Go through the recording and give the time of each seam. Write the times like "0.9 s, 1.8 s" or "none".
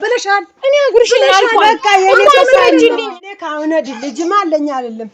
3.1 s